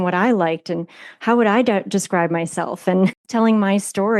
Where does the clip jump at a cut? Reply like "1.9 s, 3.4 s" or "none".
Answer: 3.2 s